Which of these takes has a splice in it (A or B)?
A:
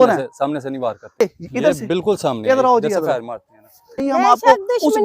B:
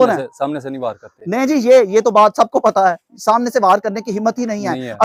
A